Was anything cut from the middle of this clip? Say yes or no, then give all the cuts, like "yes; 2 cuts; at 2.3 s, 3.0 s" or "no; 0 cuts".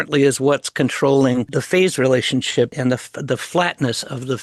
yes; 2 cuts; at 1.5 s, 2.7 s